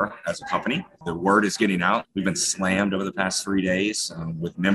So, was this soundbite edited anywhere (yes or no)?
yes